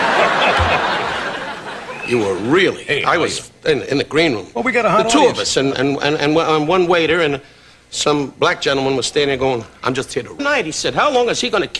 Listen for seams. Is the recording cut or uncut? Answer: uncut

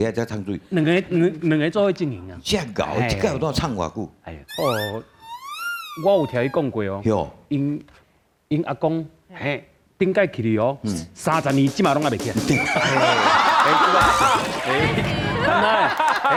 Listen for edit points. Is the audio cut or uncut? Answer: uncut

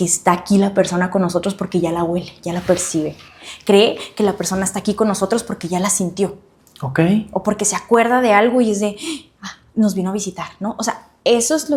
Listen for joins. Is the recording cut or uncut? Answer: uncut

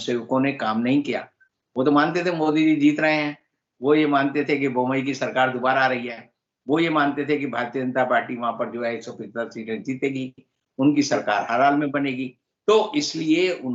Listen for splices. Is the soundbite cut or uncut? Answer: uncut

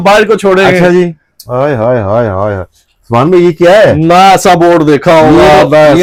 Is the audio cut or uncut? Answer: uncut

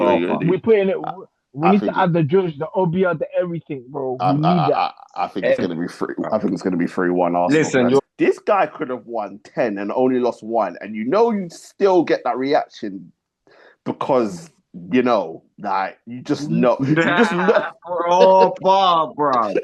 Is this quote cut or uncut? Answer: cut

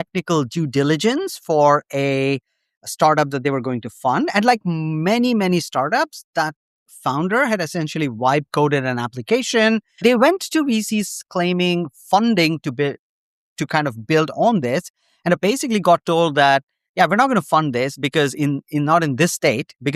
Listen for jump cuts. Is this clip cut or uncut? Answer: cut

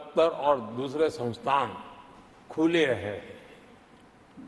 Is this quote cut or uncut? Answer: uncut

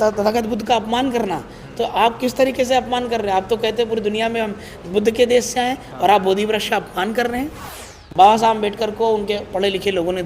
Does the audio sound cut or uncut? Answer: cut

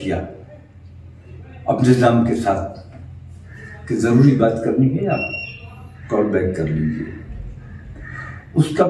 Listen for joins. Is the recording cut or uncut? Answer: uncut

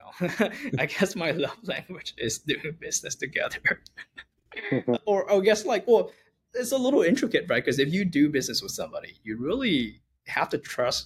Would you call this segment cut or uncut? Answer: uncut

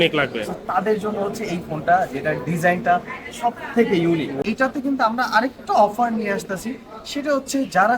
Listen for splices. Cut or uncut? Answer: cut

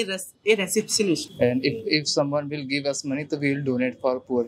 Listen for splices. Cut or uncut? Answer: cut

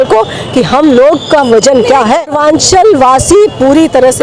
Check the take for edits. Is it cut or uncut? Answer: cut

